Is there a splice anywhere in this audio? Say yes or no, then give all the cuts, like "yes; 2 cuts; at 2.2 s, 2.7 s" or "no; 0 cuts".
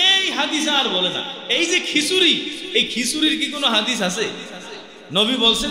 yes; 1 cut; at 1.3 s